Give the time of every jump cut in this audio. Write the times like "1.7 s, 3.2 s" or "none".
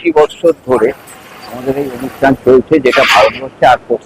none